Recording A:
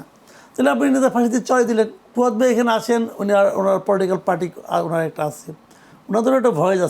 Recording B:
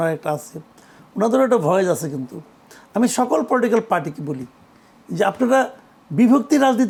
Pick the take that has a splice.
A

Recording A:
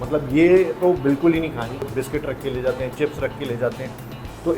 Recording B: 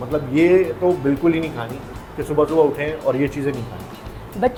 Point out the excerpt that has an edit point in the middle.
A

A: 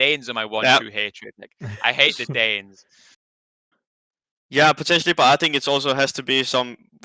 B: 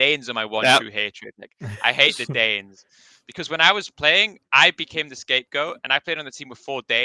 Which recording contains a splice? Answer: A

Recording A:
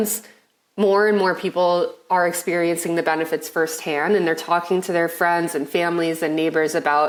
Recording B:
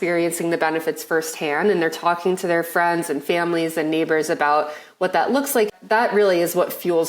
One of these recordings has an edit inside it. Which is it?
B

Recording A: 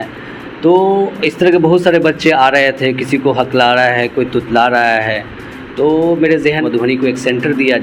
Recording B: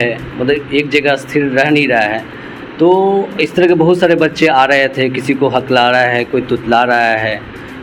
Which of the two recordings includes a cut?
A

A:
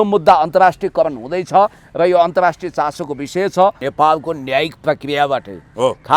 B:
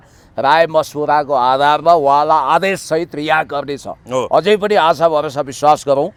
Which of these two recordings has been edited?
A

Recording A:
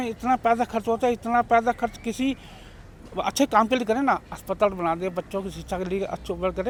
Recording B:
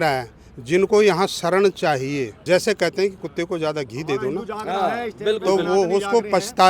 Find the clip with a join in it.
B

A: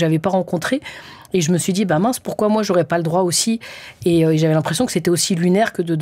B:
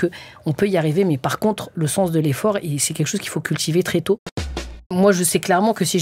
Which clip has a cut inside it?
B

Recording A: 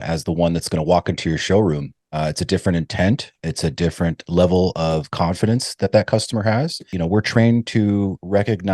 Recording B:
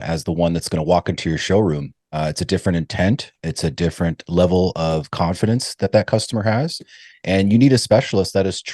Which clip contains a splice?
A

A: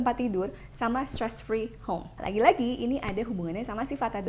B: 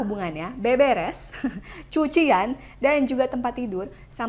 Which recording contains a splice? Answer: A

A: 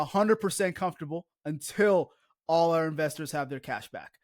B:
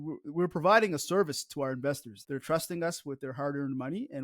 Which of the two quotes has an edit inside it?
B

